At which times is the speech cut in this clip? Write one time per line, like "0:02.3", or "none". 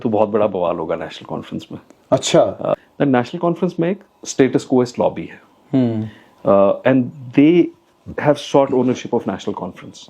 0:02.7